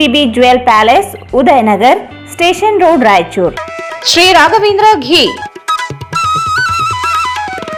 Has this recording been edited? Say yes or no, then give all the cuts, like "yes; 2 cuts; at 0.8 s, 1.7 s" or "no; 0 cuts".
no; 0 cuts